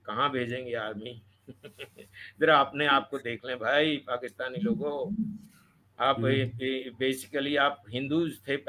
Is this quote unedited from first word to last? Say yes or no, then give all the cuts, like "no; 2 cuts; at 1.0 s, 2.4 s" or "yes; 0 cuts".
yes; 0 cuts